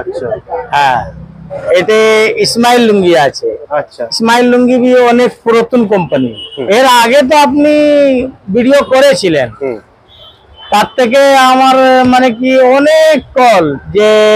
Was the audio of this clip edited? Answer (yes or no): yes